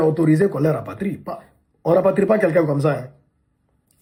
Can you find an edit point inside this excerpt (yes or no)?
no